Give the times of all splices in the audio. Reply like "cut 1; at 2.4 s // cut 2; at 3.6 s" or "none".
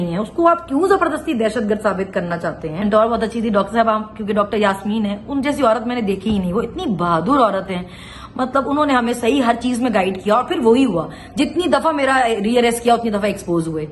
cut 1; at 2.8 s